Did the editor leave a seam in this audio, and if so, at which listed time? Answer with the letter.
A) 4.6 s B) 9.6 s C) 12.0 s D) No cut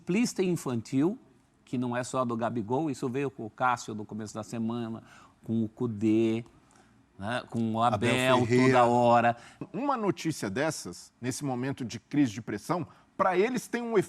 B